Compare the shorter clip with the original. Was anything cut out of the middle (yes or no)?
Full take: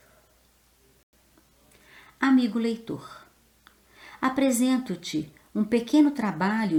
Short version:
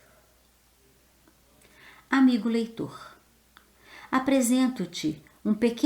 yes